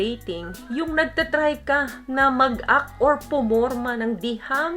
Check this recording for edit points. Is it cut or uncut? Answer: uncut